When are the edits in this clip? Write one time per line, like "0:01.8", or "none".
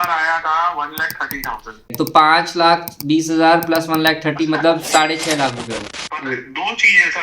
0:01.9
0:05.8